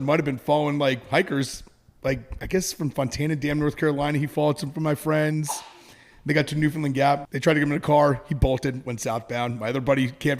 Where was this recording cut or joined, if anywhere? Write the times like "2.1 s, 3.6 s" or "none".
7.2 s